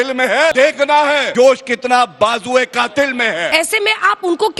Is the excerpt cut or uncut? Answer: cut